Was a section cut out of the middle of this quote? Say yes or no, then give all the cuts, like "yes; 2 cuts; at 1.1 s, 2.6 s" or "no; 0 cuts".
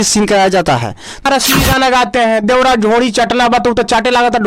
yes; 1 cut; at 1.2 s